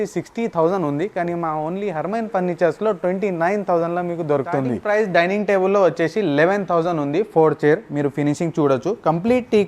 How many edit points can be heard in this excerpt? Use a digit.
1